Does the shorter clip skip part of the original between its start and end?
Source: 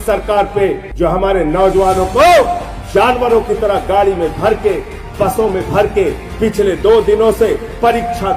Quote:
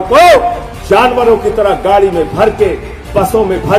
no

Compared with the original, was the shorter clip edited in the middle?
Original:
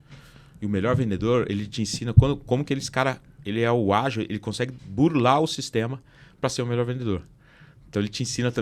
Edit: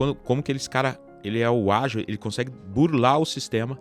no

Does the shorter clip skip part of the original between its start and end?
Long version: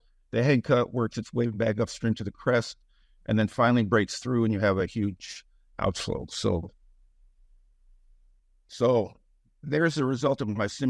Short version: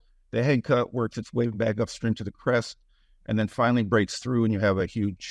no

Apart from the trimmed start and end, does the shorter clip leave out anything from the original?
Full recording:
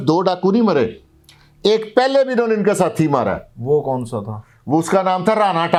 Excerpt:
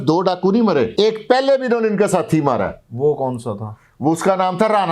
yes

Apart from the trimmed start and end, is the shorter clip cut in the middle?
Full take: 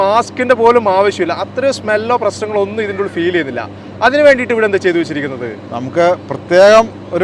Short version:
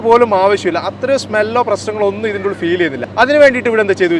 yes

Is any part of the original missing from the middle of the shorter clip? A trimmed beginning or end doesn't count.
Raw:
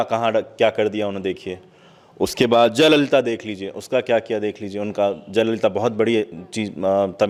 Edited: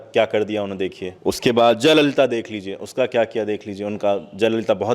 yes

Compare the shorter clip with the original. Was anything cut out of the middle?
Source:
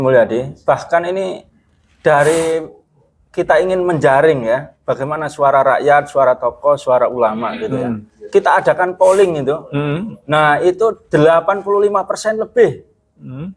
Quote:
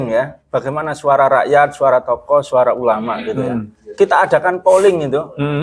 no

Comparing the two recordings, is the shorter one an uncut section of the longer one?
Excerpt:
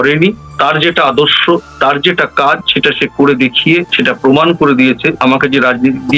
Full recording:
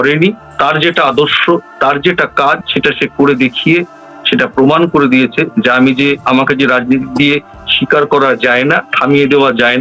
no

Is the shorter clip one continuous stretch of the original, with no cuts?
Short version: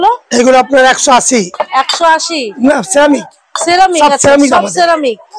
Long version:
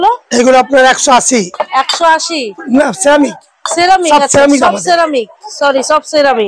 no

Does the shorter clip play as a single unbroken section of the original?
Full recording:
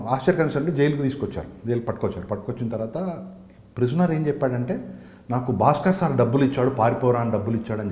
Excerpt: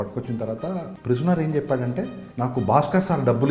no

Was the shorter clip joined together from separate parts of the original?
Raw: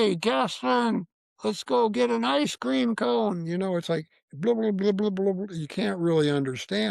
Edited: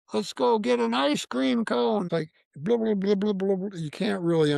yes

